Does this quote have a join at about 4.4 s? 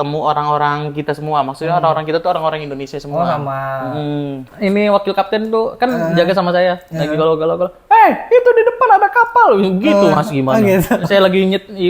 yes; 1 cut; at 4.4 s

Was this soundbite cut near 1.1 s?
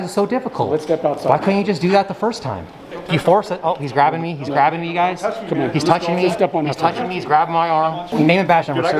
no; 2 cuts; at 2.9 s, 8.0 s

